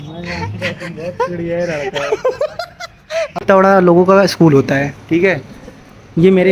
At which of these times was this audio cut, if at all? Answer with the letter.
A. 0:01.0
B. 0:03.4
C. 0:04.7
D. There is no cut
B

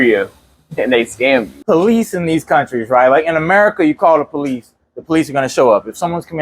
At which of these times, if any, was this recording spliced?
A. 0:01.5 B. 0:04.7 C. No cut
A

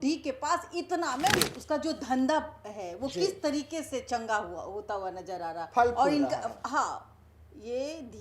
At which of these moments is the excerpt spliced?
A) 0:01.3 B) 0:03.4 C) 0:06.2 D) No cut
A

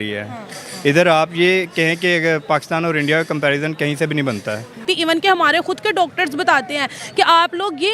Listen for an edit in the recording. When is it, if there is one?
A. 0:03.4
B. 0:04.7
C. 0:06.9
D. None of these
B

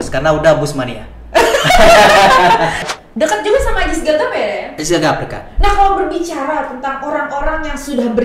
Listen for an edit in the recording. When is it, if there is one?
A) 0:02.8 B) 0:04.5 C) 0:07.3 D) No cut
A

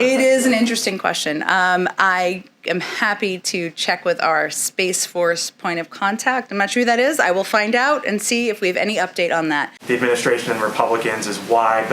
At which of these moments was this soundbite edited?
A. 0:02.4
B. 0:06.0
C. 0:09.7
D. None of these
C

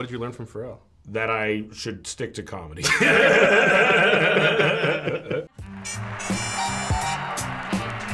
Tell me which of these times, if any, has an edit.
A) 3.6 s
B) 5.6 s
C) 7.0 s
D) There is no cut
B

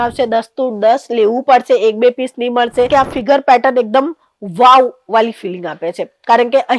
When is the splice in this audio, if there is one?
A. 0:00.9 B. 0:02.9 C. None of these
B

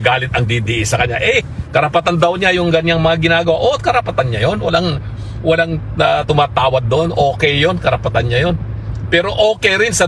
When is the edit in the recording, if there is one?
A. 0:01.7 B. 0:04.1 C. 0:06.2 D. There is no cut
D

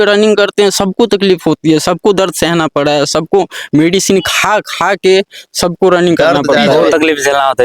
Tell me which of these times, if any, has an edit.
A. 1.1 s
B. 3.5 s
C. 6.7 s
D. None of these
C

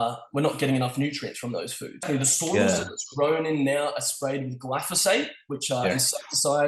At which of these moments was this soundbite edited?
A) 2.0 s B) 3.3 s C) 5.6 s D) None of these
A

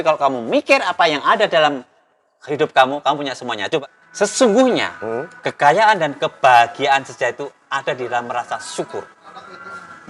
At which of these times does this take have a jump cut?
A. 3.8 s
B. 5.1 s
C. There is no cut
A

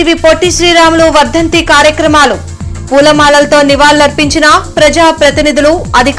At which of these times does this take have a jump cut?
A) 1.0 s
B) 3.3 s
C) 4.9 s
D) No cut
D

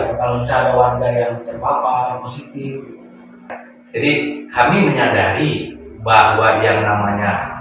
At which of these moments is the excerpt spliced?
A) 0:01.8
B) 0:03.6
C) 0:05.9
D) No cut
B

